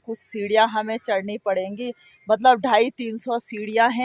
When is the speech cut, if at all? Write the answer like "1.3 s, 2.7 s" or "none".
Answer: none